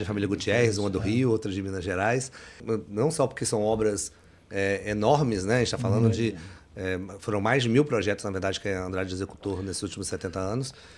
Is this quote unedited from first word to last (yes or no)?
no